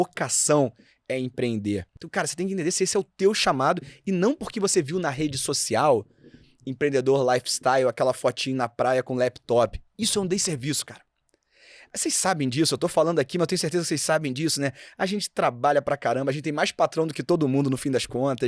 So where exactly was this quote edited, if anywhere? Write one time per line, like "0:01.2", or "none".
0:02.0